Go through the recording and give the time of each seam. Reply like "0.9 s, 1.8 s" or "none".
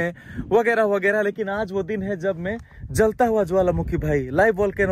none